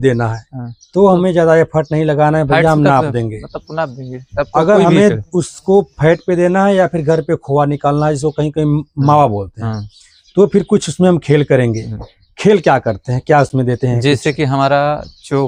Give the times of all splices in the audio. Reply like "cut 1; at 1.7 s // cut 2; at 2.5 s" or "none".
none